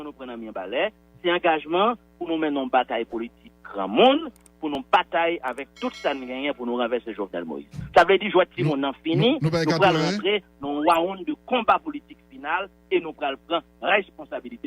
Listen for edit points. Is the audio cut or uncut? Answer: uncut